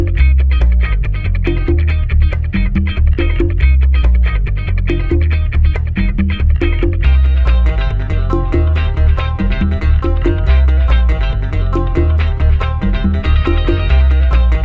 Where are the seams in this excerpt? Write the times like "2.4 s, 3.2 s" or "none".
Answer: none